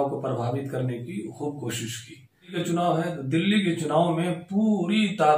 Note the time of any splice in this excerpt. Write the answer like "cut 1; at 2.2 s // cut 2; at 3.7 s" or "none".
cut 1; at 2.6 s